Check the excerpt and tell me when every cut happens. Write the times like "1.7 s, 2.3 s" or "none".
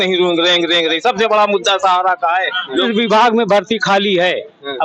2.8 s